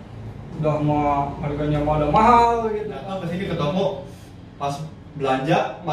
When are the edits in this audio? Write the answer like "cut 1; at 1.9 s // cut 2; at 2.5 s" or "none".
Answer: cut 1; at 2.9 s